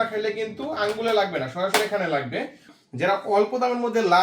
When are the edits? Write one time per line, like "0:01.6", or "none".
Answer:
0:02.7